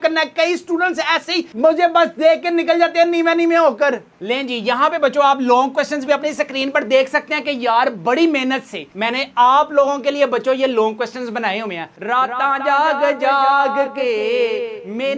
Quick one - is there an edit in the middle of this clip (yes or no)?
yes